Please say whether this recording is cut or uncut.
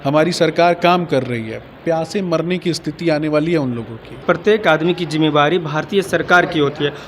cut